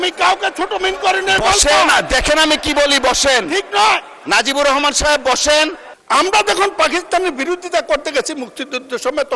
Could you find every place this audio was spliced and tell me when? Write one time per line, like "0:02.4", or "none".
0:05.9